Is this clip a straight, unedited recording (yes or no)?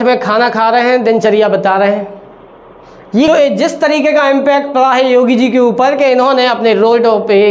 no